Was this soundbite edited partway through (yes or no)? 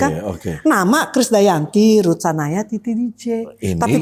no